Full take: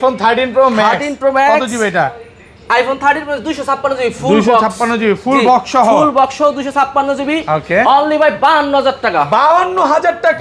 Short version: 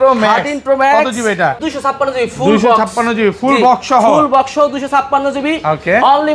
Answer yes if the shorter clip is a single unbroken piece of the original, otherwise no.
no